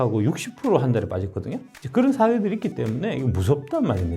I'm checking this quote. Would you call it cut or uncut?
uncut